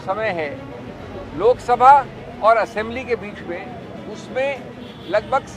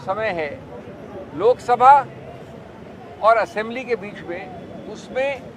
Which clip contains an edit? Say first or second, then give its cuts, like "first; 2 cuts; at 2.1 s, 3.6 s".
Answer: first; 1 cut; at 2.2 s